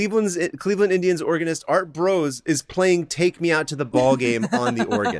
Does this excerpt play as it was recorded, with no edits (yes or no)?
yes